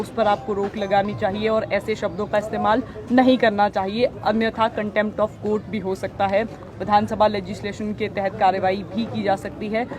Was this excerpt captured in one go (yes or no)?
yes